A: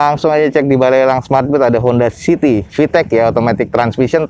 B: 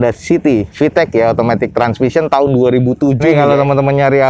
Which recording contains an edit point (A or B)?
B